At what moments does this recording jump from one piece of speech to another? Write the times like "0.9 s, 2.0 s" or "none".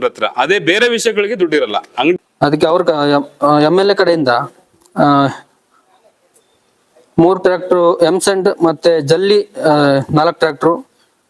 2.1 s